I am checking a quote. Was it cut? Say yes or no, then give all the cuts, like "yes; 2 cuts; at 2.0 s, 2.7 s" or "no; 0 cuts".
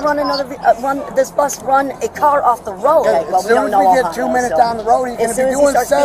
yes; 1 cut; at 3.0 s